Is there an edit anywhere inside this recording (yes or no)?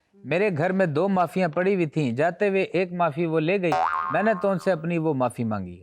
no